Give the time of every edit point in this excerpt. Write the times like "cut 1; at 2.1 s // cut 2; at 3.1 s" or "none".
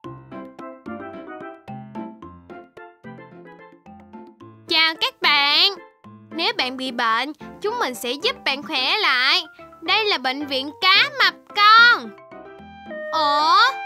cut 1; at 4.0 s